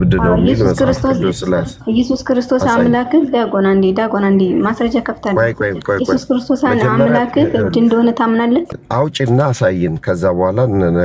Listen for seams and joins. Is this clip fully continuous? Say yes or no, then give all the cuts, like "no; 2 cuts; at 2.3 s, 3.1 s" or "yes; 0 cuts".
no; 1 cut; at 8.8 s